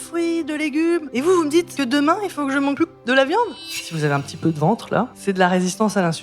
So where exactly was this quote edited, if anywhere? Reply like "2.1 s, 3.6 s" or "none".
1.1 s, 1.7 s, 2.8 s, 3.6 s, 5.1 s

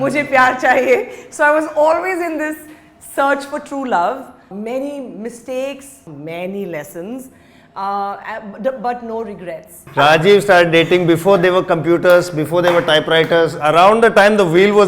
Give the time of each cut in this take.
4.5 s, 6.0 s, 9.8 s

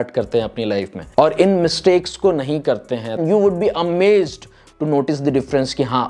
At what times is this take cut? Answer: 1.0 s, 3.2 s

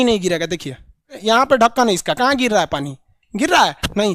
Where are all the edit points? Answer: 1.1 s

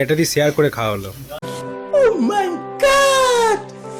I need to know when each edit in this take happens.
none

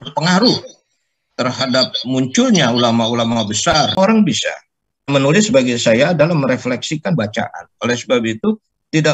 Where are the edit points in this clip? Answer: 4.0 s

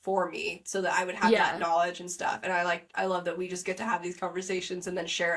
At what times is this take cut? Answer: none

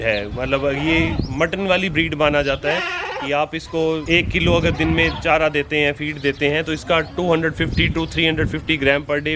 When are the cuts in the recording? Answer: none

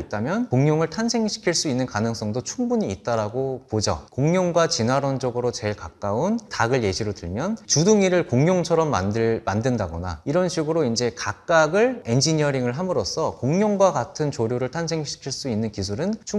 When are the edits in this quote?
4.0 s, 10.1 s

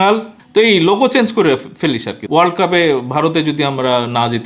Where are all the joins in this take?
2.2 s

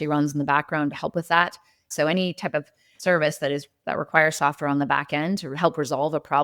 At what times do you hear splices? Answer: 1.9 s

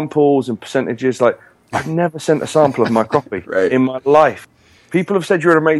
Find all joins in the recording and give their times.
4.4 s

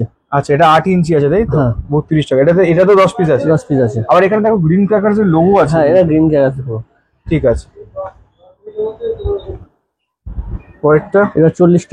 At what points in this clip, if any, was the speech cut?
none

